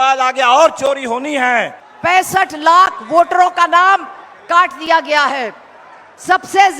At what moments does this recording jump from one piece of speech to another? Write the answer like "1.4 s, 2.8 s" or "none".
1.8 s